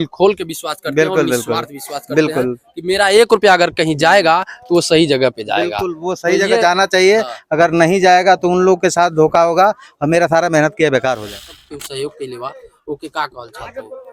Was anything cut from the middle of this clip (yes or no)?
yes